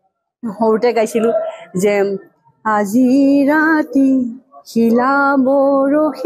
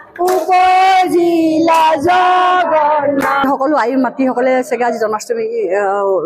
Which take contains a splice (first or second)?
second